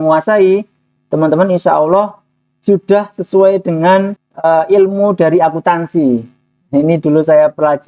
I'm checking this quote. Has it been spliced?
yes; 1 cut; at 4.2 s

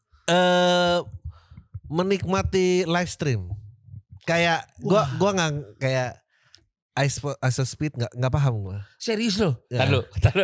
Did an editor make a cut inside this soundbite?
no; 0 cuts

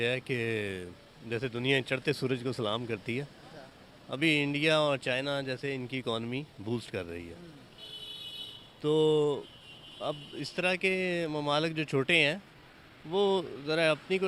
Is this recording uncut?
yes; 0 cuts

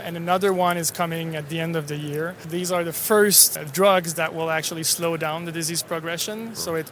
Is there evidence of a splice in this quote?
yes; 2 cuts; at 2.4 s, 3.5 s

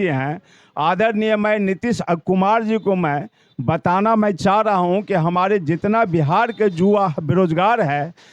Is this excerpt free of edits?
yes; 0 cuts

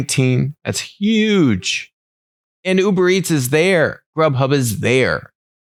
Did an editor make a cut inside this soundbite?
no; 0 cuts

